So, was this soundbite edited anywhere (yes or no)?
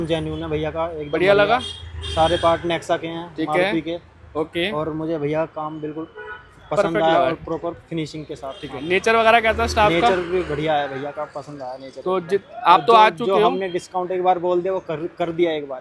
no